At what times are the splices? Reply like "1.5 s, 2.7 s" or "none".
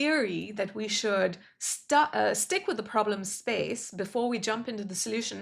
none

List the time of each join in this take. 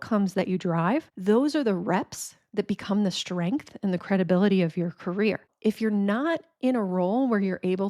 1.1 s, 5.5 s

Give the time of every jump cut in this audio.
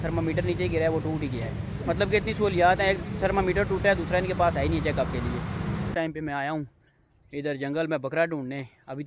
5.8 s

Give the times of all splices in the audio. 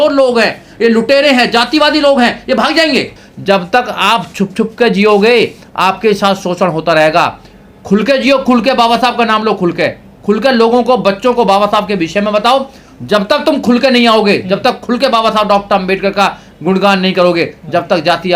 3.2 s

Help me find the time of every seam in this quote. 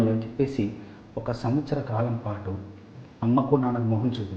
3.0 s

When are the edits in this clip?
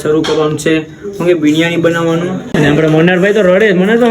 2.5 s

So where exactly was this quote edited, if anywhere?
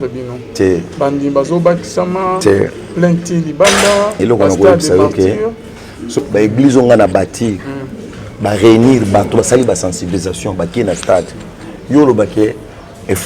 6.2 s

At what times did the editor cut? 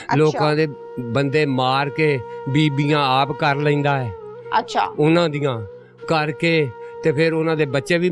none

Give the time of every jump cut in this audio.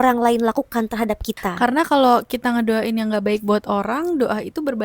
1.5 s

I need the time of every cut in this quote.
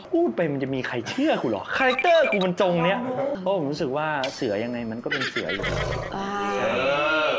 3.4 s

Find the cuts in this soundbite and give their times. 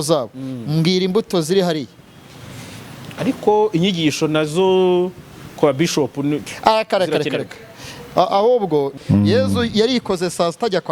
8.9 s

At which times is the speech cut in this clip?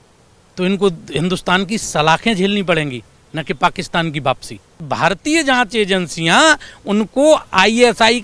4.8 s

